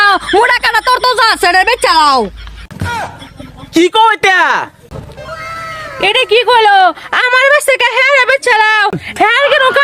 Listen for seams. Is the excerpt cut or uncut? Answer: uncut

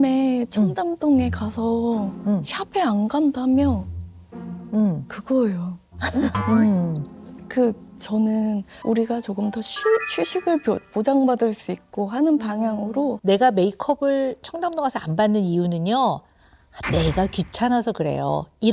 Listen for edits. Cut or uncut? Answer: cut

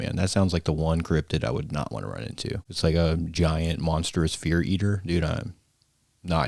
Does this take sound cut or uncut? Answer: cut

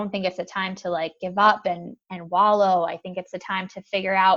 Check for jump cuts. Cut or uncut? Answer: uncut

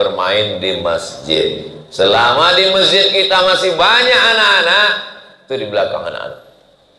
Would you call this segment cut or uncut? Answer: uncut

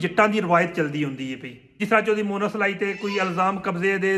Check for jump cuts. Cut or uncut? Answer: cut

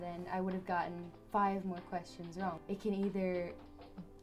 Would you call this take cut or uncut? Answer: cut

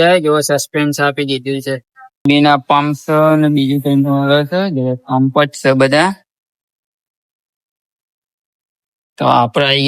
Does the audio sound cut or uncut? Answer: cut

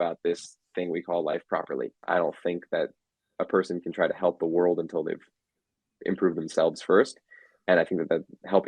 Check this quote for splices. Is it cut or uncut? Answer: cut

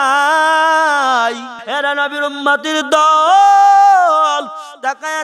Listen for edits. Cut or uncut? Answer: cut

